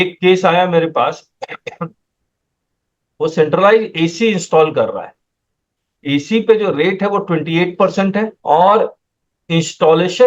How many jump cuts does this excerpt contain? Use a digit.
1